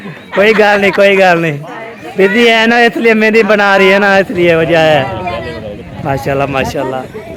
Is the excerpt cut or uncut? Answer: uncut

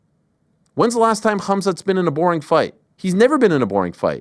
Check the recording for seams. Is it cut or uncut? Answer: cut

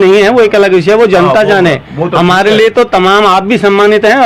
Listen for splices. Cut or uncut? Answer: uncut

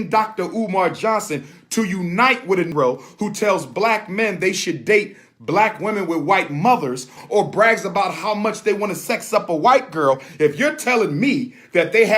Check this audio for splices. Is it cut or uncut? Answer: cut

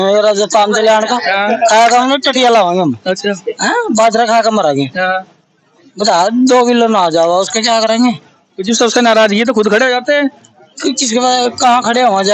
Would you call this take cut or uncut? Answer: uncut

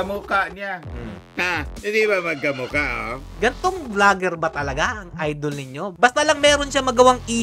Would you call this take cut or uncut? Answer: cut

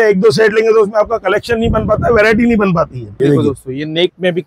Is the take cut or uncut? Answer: cut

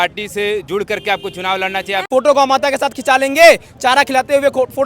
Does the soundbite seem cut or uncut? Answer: cut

